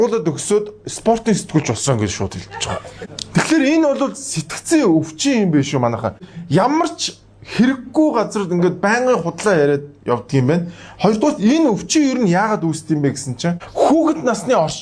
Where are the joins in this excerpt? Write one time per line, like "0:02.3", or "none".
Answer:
0:02.9
0:06.3
0:13.6